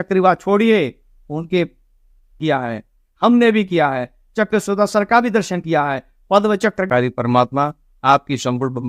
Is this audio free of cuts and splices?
no; 2 cuts; at 2.4 s, 6.9 s

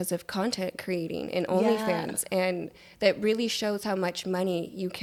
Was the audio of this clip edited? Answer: no; 0 cuts

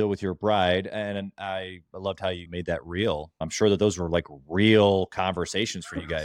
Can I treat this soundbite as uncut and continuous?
no; 2 cuts; at 2.4 s, 3.4 s

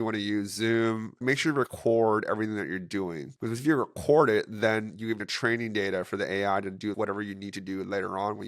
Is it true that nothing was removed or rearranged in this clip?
no; 4 cuts; at 1.2 s, 3.3 s, 5.2 s, 7.0 s

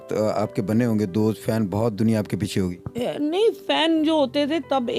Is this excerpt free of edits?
yes; 0 cuts

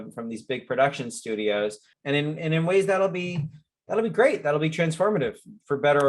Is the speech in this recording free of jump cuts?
no; 1 cut; at 1.9 s

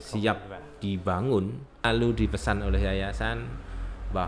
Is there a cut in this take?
yes; 1 cut; at 1.9 s

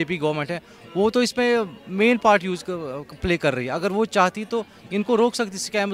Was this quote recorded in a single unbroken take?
yes; 0 cuts

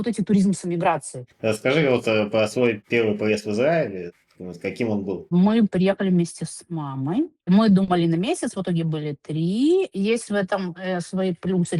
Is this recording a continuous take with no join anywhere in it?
yes; 0 cuts

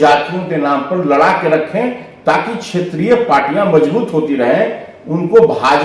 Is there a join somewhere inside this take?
no; 0 cuts

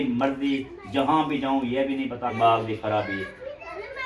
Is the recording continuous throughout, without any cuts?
no; 1 cut; at 2.3 s

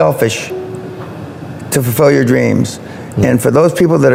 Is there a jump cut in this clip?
no; 0 cuts

